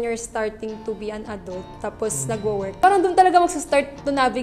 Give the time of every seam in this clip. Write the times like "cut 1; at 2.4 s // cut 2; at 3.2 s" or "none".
none